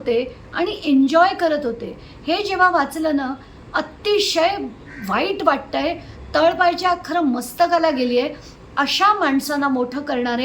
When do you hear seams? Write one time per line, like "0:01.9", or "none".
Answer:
none